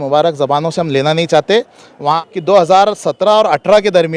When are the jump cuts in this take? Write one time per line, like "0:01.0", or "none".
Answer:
0:02.2